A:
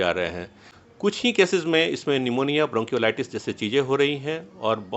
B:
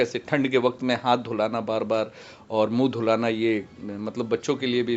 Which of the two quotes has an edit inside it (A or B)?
A